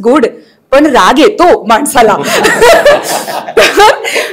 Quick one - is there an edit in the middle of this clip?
no; 0 cuts

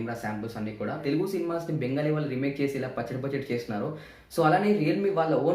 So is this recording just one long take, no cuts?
no; 1 cut; at 1.0 s

